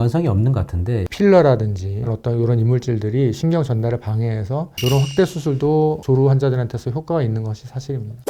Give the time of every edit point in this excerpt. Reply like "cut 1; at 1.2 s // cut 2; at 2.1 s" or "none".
cut 1; at 1.1 s // cut 2; at 2.1 s